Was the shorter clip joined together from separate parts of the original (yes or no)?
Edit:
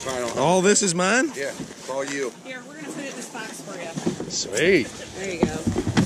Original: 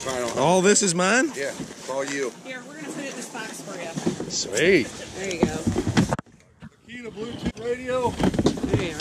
no